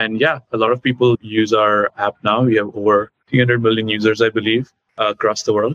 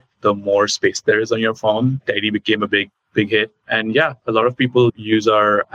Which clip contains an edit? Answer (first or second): first